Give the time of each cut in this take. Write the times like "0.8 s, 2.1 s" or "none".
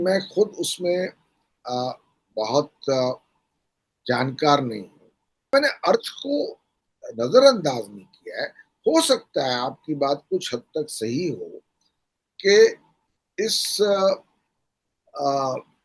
5.5 s